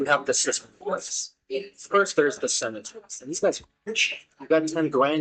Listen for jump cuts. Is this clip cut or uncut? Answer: uncut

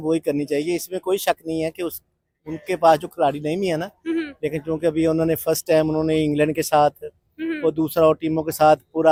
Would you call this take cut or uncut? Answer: uncut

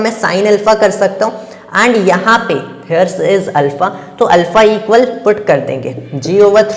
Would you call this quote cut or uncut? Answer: uncut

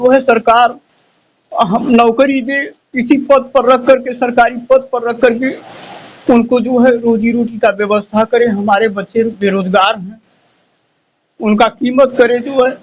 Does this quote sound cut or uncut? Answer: uncut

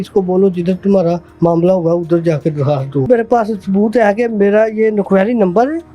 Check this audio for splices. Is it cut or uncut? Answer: cut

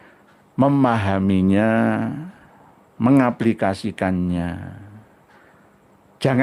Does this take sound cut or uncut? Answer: uncut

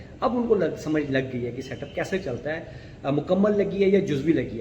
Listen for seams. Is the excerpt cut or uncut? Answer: uncut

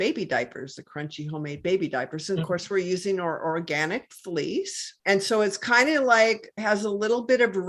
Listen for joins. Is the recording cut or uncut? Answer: cut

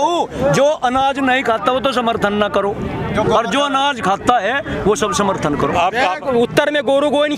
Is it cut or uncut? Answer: cut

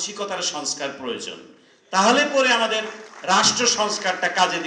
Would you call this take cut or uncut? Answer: uncut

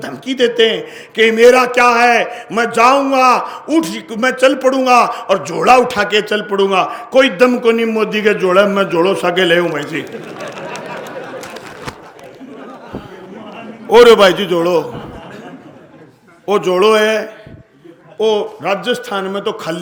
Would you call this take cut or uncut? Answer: uncut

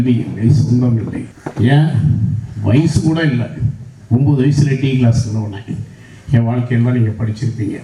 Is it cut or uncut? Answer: uncut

